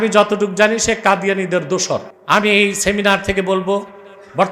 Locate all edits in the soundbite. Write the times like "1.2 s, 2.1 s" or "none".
2.1 s